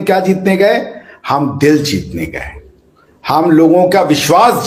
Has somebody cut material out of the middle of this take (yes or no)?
no